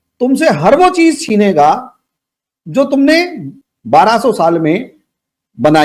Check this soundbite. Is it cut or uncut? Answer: cut